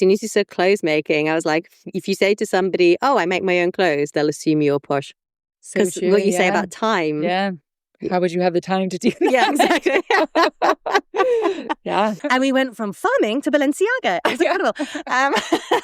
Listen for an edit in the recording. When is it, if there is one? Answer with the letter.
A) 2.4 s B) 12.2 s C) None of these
B